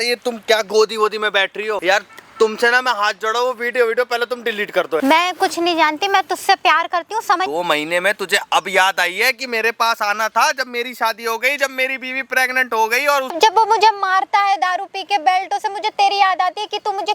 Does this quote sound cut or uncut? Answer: cut